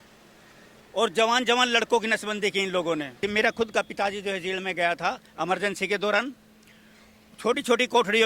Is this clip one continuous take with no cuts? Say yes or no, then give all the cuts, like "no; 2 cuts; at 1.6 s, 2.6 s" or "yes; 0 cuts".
no; 1 cut; at 3.2 s